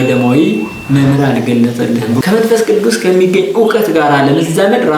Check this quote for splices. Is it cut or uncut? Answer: cut